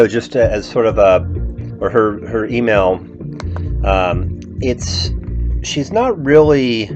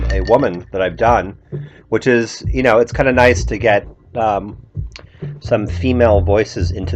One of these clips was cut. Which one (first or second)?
first